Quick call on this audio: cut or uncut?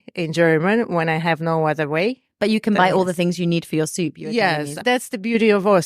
cut